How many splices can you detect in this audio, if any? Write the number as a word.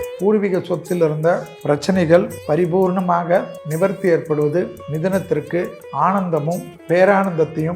six